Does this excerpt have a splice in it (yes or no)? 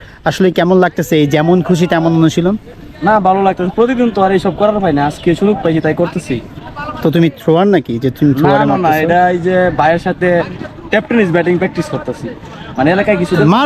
no